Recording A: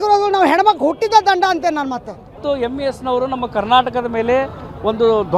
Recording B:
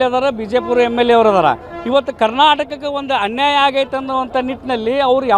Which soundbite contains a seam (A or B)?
A